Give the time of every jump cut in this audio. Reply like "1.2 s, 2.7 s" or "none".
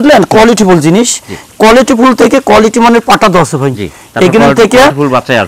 none